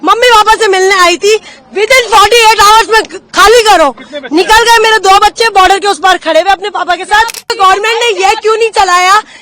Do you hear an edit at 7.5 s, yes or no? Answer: yes